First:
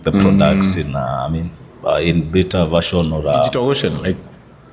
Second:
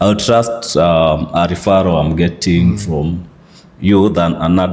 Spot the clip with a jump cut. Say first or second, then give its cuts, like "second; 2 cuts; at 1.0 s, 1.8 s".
first; 1 cut; at 3.6 s